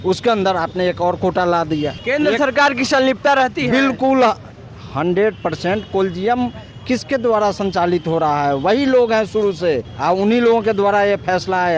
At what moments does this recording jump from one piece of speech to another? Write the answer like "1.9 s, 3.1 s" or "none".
2.0 s, 9.9 s